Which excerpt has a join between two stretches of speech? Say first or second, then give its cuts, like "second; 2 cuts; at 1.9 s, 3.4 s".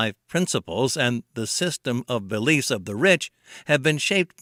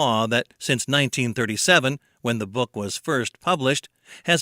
second; 1 cut; at 2.3 s